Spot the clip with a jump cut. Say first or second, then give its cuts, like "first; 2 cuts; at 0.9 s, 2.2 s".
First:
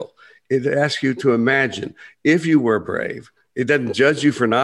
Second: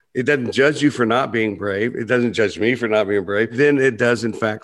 second; 1 cut; at 3.5 s